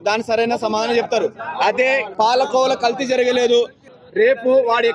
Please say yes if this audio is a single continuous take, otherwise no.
no